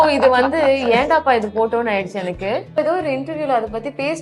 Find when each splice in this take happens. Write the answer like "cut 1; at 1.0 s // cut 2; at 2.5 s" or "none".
cut 1; at 2.8 s